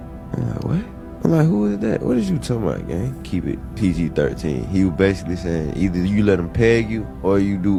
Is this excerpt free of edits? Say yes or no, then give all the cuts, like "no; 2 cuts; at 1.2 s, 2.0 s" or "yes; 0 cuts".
yes; 0 cuts